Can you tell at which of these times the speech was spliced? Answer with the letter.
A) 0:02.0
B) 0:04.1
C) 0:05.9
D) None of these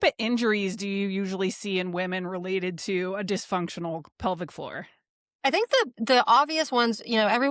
B